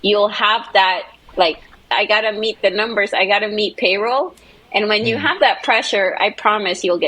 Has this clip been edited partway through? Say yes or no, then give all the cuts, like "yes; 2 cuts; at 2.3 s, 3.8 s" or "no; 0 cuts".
yes; 1 cut; at 1.9 s